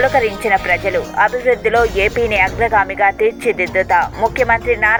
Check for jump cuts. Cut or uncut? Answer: uncut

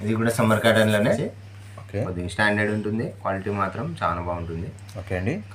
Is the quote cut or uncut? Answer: cut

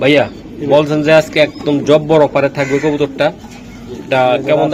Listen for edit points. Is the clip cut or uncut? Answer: uncut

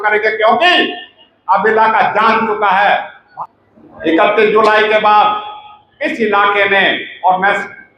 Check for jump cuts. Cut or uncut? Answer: cut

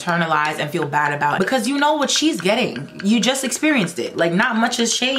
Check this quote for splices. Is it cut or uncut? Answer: cut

